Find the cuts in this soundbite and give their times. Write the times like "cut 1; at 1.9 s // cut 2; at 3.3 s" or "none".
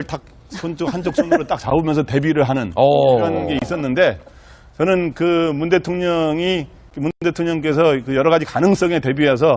cut 1; at 8.2 s

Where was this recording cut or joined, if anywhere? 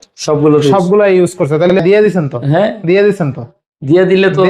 cut 1; at 1.8 s

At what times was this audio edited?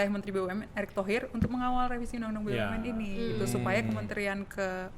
none

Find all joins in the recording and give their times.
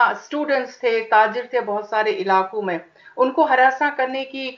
none

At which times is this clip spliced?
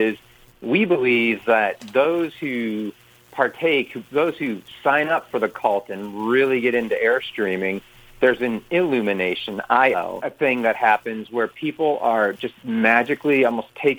none

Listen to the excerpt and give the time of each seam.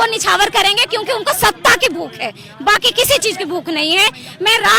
none

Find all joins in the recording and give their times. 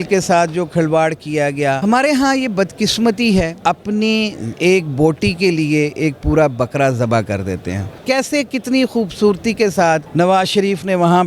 cut 1; at 1.8 s // cut 2; at 3.5 s // cut 3; at 4.5 s // cut 4; at 7.9 s // cut 5; at 10.1 s

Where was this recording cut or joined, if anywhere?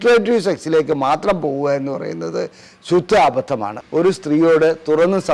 cut 1; at 3.8 s

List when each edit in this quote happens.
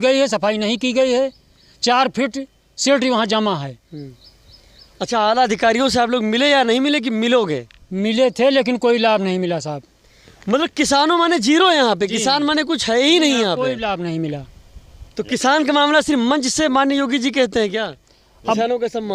none

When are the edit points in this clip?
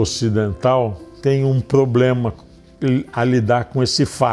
cut 1; at 1.1 s

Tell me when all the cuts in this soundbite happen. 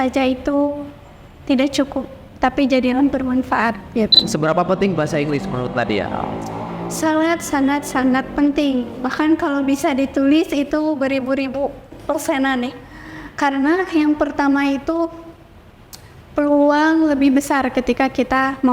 cut 1; at 4.2 s

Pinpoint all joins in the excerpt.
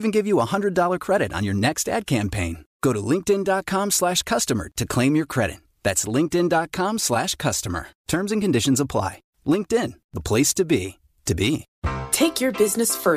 cut 1; at 11.7 s

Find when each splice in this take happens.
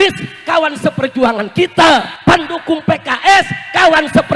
cut 1; at 2.1 s

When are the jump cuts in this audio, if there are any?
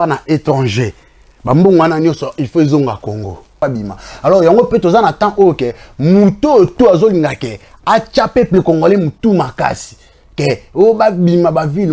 cut 1; at 3.6 s

